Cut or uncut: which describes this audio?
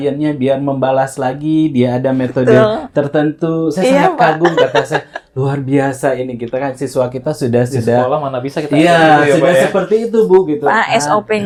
uncut